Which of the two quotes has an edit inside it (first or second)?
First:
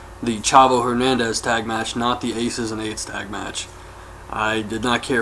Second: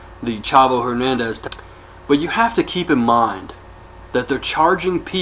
first